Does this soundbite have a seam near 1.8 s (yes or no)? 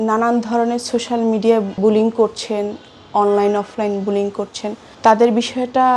yes